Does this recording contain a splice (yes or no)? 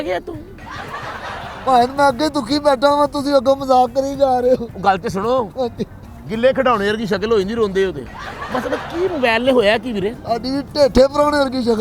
no